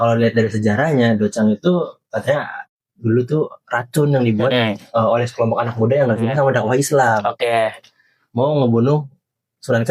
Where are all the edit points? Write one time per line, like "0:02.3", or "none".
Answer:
none